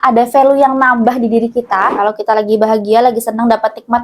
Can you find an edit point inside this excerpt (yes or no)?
yes